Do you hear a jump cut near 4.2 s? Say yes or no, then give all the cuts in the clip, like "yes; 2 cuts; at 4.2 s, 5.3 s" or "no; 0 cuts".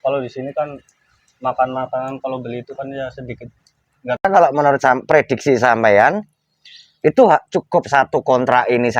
yes; 1 cut; at 4.2 s